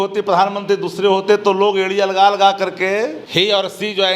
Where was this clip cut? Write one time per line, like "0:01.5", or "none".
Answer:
0:03.2